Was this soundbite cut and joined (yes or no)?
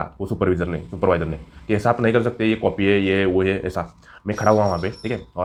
no